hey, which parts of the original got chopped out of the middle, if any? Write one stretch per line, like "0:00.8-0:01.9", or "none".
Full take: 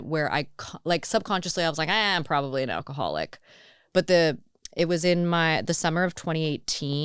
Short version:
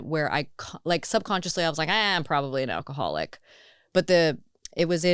none